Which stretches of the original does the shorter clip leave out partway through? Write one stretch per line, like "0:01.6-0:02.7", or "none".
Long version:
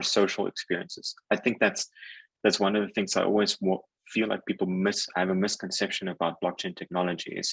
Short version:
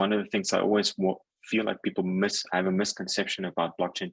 none

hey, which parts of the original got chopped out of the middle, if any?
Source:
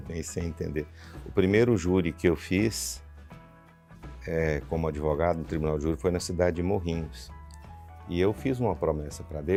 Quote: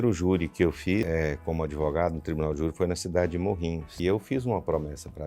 0:02.7-0:04.3
0:07.1-0:08.0

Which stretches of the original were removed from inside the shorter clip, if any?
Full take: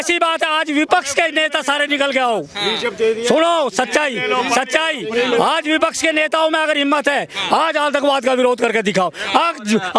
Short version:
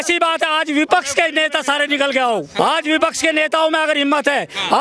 0:02.6-0:05.4

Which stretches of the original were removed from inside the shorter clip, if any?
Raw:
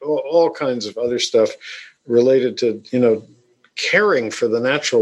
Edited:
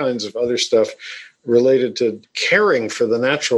0:02.8-0:03.6

